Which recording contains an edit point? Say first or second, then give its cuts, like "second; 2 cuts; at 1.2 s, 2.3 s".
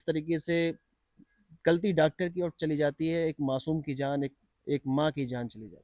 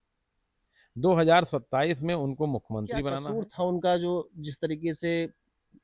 second; 1 cut; at 3.2 s